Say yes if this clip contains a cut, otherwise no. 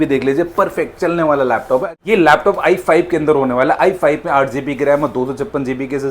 yes